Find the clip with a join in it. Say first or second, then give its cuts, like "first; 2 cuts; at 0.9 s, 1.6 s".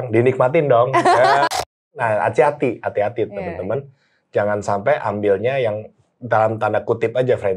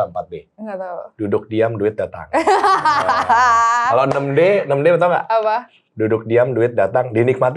first; 1 cut; at 1.6 s